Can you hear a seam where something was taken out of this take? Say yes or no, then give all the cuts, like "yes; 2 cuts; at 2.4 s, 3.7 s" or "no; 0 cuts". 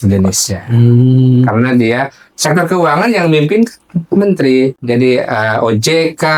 yes; 1 cut; at 4.9 s